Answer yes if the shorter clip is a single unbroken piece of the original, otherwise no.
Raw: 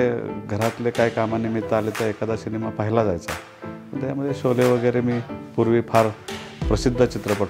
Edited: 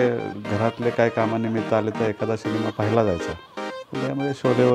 yes